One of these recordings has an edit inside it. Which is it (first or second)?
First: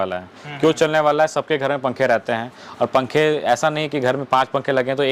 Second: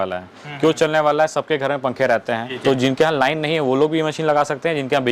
second